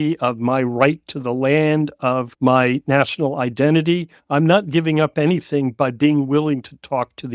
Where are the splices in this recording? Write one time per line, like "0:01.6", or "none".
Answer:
0:02.3